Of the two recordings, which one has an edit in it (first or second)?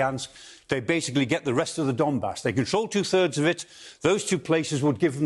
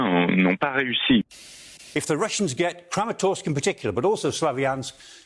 second